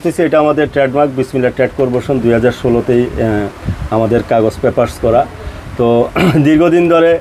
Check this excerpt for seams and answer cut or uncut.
uncut